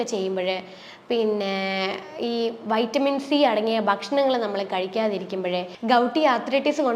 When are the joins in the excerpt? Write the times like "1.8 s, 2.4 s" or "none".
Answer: 5.7 s